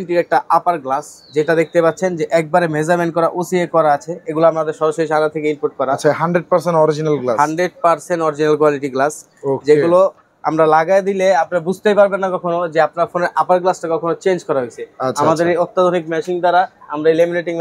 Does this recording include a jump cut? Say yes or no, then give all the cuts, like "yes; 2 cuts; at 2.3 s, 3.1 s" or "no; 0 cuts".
no; 0 cuts